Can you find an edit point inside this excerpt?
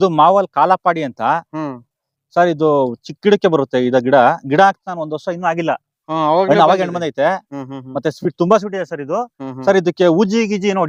no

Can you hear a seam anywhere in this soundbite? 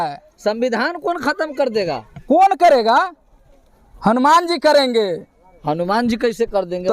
no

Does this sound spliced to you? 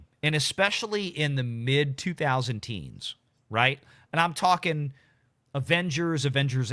no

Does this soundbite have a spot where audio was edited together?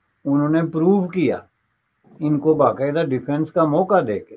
no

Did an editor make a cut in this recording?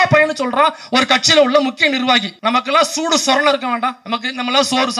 yes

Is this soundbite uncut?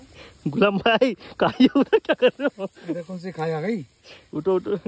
yes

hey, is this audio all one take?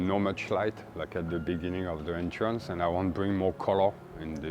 yes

